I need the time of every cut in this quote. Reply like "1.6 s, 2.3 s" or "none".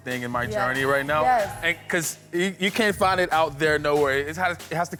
none